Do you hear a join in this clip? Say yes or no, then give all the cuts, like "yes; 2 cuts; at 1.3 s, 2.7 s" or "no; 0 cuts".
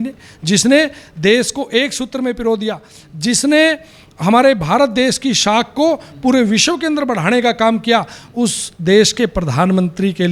no; 0 cuts